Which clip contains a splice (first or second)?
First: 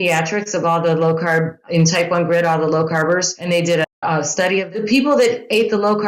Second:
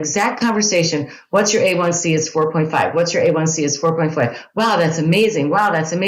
first